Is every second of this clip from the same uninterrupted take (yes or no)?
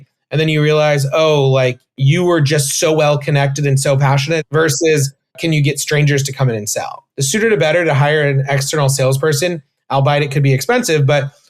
no